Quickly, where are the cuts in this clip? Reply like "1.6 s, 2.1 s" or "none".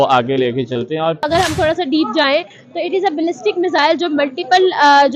1.2 s